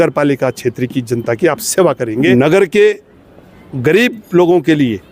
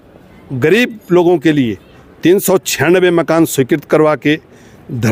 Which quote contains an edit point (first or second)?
first